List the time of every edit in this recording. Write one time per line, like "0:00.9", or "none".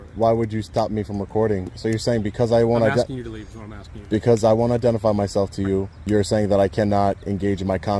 0:01.7
0:05.9